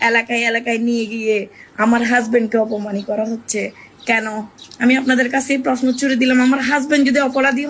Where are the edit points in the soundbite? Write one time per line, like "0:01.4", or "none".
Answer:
0:04.6